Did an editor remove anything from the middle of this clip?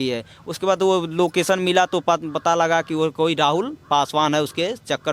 no; 0 cuts

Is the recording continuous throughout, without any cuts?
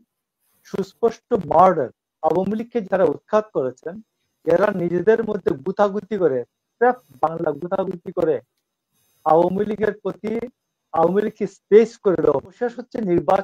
no; 2 cuts; at 2.1 s, 12.6 s

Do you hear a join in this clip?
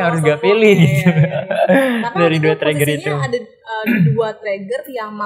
no; 0 cuts

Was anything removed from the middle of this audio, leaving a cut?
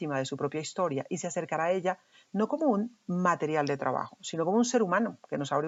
no; 0 cuts

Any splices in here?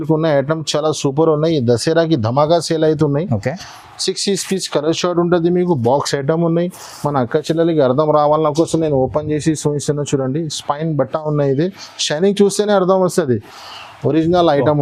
no; 0 cuts

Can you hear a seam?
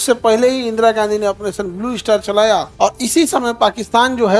yes; 1 cut; at 2.7 s

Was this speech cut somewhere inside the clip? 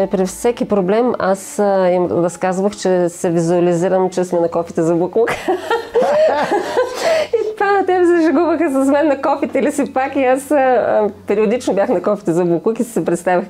no; 0 cuts

